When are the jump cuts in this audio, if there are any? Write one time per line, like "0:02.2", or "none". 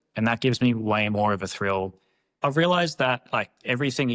0:02.4